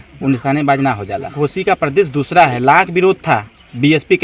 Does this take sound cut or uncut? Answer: cut